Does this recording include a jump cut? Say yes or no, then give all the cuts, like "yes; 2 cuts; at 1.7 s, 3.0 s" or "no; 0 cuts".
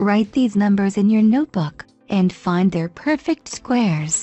yes; 1 cut; at 2.9 s